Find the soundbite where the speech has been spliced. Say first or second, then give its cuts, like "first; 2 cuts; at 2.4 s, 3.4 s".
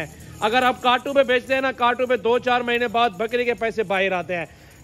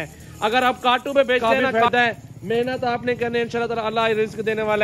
second; 1 cut; at 1.4 s